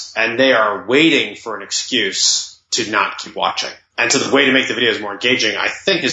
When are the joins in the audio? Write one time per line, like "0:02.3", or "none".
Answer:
0:03.8

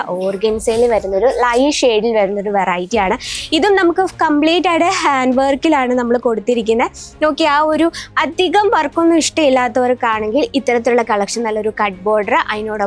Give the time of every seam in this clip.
none

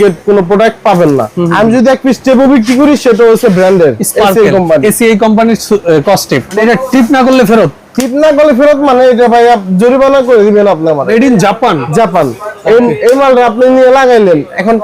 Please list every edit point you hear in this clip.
0:01.3
0:06.5
0:11.1

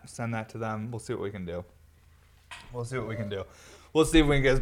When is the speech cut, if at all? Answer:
none

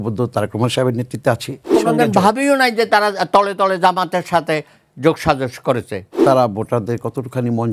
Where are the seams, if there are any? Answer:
0:01.7
0:06.2

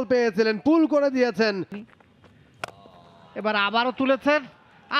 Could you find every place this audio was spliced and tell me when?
0:01.8

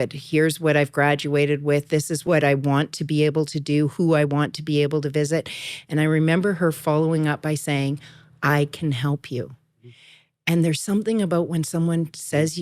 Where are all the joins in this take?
0:02.2

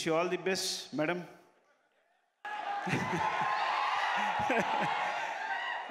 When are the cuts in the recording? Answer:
none

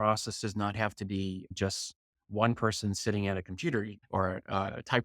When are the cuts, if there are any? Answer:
0:04.0

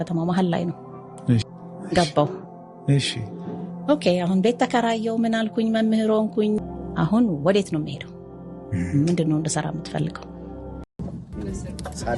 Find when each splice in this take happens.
0:01.5
0:06.6
0:11.0

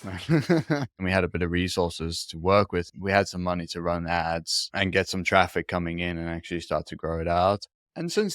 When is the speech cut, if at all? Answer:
0:01.0
0:02.9

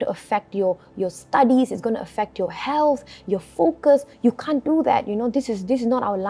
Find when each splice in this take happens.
none

